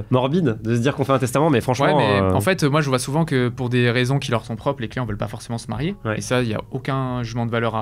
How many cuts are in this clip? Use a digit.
0